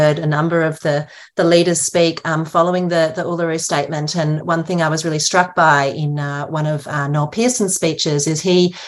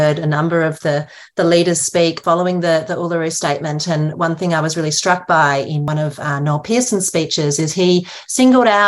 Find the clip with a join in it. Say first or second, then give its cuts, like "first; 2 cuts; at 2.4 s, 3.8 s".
second; 2 cuts; at 2.2 s, 5.9 s